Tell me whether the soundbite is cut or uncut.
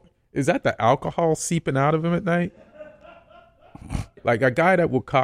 cut